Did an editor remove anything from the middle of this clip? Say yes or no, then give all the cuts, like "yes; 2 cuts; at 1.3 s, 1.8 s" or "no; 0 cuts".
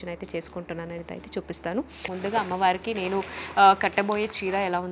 yes; 1 cut; at 2.0 s